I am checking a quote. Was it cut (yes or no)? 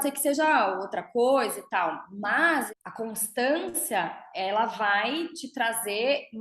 yes